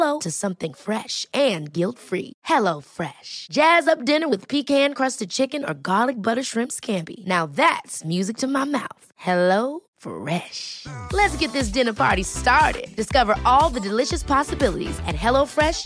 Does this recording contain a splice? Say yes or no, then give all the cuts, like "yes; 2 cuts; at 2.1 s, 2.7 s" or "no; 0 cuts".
no; 0 cuts